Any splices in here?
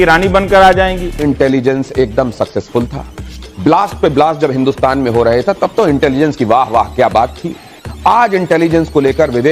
yes; 1 cut; at 1.1 s

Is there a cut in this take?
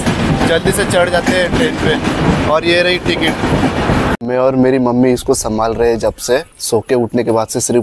yes; 2 cuts; at 4.2 s, 6.6 s

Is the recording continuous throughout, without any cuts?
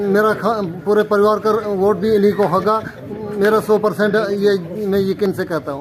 yes; 0 cuts

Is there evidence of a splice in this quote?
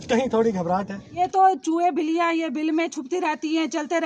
yes; 1 cut; at 1.0 s

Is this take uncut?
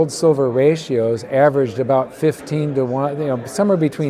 yes; 0 cuts

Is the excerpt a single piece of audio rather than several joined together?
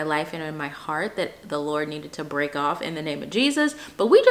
yes; 0 cuts

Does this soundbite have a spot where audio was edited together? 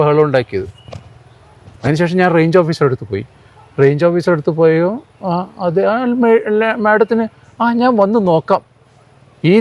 no; 0 cuts

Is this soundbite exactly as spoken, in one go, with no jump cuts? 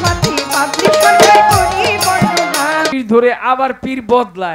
no; 1 cut; at 2.9 s

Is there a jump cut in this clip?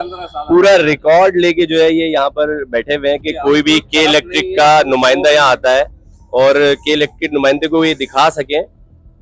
no; 0 cuts

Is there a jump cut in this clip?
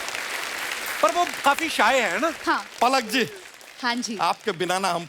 yes; 1 cut; at 2.7 s

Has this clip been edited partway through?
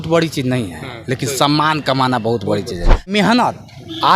yes; 1 cut; at 3.1 s

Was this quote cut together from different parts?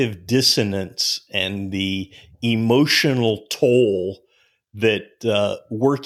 no; 0 cuts

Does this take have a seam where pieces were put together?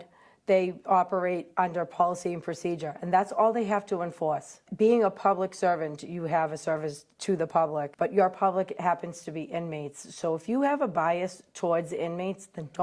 no; 0 cuts

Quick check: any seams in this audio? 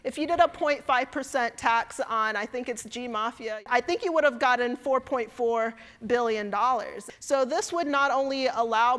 yes; 2 cuts; at 3.6 s, 7.0 s

